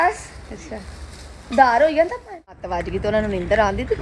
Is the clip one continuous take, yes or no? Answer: no